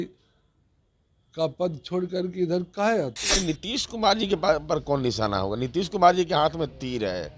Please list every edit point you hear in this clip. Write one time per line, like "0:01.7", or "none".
0:03.4